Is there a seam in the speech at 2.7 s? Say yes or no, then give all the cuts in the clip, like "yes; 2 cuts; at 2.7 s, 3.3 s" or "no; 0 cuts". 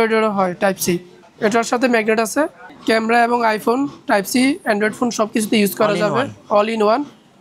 yes; 1 cut; at 2.7 s